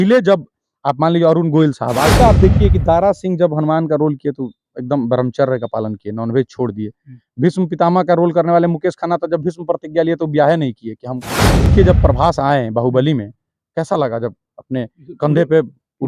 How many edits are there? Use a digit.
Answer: 2